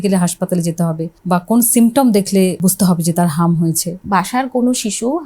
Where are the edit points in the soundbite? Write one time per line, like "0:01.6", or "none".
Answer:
0:01.1
0:02.6
0:04.0